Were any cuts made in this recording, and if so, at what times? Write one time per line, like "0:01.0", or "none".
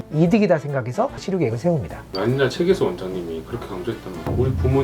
0:01.2
0:02.0